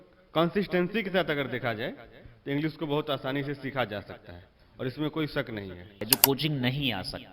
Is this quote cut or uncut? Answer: cut